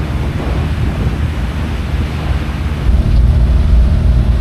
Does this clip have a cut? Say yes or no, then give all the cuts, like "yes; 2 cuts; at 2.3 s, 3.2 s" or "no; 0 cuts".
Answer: no; 0 cuts